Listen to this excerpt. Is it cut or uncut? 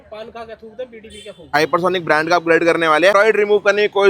cut